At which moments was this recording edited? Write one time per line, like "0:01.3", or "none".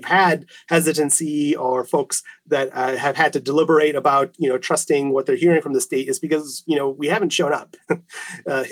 none